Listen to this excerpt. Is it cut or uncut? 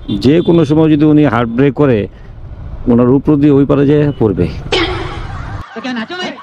uncut